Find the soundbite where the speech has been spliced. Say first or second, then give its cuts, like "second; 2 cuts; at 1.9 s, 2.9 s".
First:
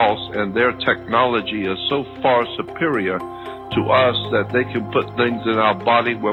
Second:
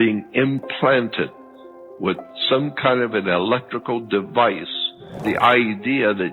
second; 1 cut; at 5.2 s